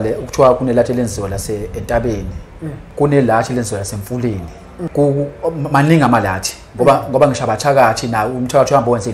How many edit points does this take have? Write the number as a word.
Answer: two